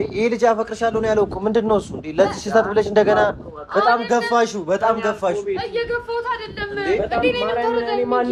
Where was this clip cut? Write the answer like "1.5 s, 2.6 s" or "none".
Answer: none